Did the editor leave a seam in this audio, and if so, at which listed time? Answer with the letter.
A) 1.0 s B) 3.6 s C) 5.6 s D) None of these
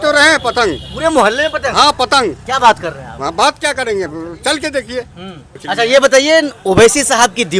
C